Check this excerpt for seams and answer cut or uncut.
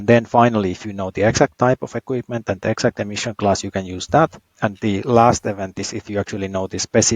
cut